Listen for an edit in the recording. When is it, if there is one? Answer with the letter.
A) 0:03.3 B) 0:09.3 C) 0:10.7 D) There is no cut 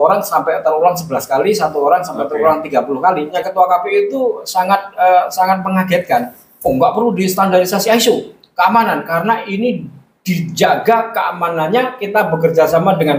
A